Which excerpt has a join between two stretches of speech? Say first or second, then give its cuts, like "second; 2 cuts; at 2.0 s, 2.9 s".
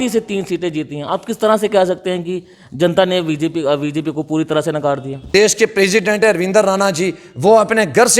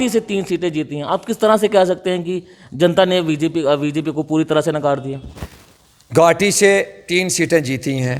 first; 1 cut; at 5.3 s